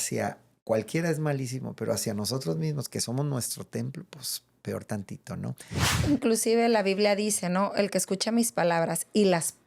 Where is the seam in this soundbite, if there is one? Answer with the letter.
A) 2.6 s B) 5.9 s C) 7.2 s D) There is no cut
B